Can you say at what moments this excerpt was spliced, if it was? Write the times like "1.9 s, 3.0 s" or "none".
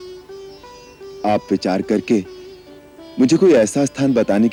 none